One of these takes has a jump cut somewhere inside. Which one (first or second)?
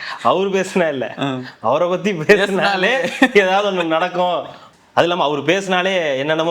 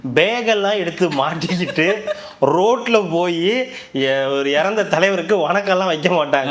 first